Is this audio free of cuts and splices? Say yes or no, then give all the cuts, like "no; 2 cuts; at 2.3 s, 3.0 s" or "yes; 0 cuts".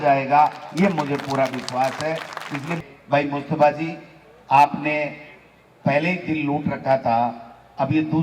no; 1 cut; at 2.8 s